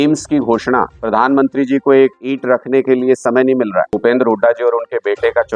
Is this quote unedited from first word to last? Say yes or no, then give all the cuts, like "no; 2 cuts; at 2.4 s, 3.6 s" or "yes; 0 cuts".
no; 3 cuts; at 1.0 s, 2.3 s, 3.9 s